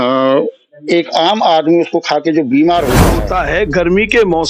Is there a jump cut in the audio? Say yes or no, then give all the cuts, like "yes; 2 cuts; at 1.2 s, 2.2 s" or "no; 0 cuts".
yes; 1 cut; at 3.2 s